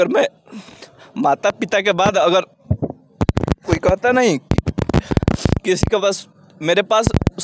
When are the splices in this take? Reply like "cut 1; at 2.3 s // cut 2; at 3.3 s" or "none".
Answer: cut 1; at 3.6 s